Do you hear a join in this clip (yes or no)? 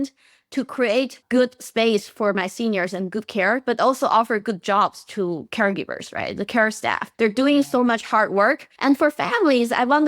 yes